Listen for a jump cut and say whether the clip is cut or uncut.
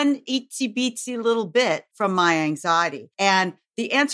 cut